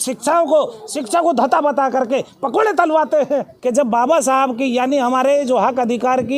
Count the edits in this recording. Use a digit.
1